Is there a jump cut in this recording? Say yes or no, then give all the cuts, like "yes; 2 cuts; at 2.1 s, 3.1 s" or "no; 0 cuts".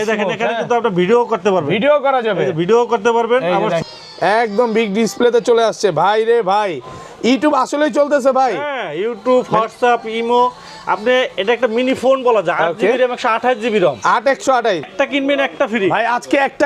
yes; 2 cuts; at 3.8 s, 14.9 s